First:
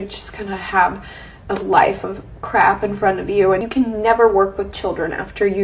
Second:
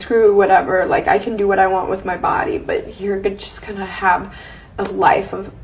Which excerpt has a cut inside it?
first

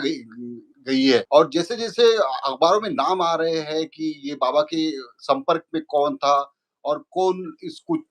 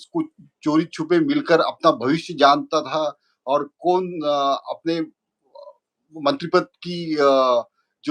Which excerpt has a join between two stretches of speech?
first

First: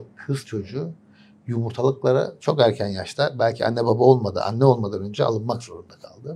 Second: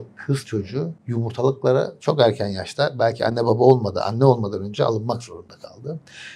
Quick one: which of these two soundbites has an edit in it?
second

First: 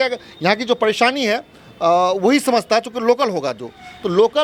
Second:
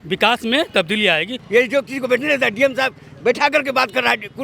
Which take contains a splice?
second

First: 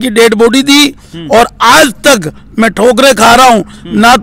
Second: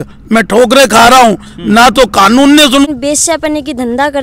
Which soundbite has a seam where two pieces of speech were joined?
second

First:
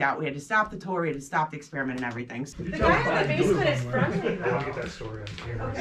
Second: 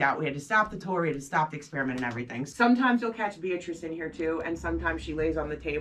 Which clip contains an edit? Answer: second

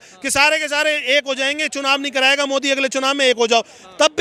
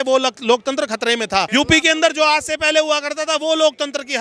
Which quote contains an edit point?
second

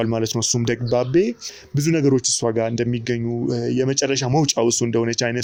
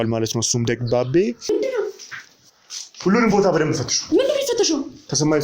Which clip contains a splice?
second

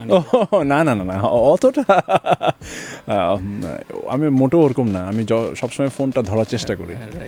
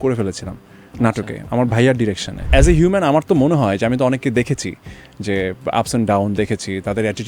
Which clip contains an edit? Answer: second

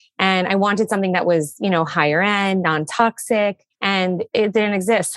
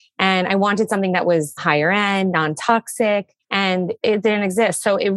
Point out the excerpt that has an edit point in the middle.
second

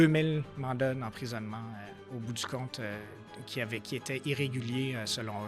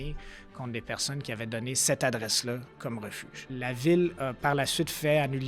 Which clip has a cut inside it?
second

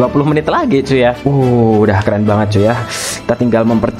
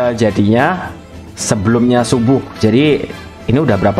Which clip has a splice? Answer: first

